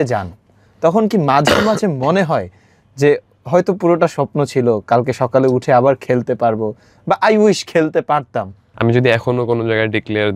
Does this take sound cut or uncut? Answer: cut